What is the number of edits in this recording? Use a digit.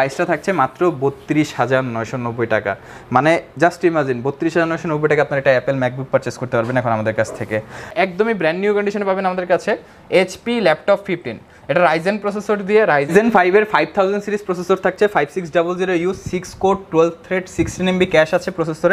2